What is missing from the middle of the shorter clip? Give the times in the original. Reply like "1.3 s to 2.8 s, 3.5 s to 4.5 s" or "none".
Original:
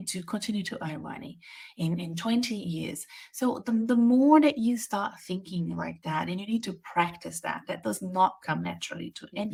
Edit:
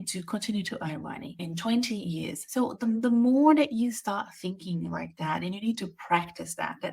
1.4 s to 2.0 s, 3.0 s to 3.2 s